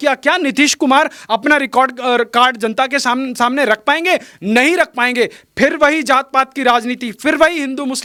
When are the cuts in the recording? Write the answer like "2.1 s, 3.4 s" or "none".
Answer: none

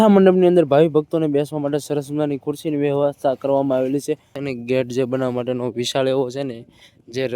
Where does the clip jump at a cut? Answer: 4.3 s

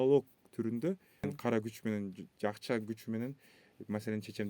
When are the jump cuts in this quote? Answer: 1.3 s

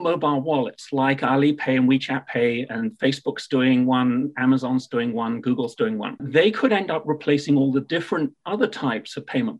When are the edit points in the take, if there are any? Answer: 6.2 s

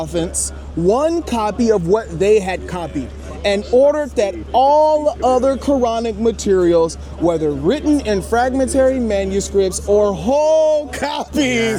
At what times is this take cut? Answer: none

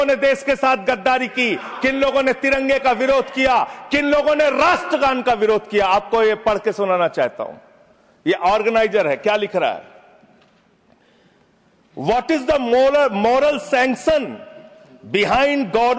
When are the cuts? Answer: none

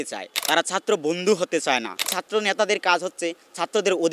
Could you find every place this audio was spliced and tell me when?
2.0 s

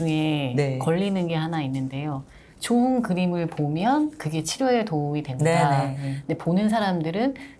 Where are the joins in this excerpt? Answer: none

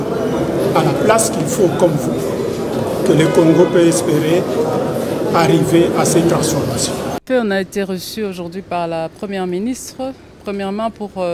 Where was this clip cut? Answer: 7.1 s

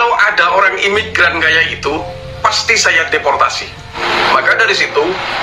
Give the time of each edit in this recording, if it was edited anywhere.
3.9 s

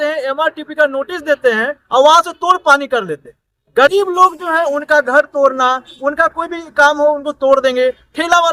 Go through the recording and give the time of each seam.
none

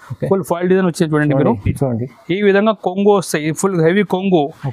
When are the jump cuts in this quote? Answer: 1.7 s

